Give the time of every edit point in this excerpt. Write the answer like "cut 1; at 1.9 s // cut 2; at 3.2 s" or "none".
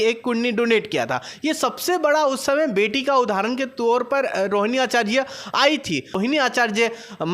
cut 1; at 6.1 s